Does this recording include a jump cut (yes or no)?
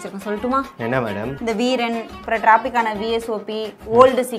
no